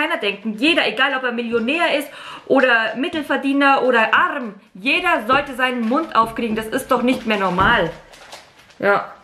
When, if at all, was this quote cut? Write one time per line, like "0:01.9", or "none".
none